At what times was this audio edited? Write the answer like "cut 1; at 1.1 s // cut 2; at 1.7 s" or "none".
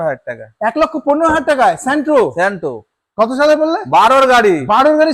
none